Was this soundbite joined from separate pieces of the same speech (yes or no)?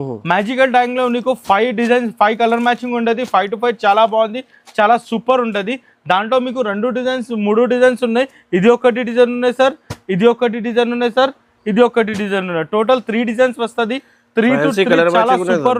no